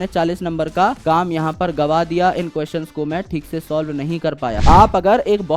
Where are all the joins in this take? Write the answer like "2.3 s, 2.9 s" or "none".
4.6 s